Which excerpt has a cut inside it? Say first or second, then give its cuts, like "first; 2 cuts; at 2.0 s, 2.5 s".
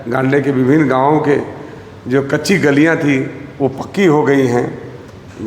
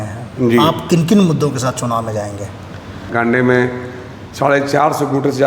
second; 1 cut; at 3.0 s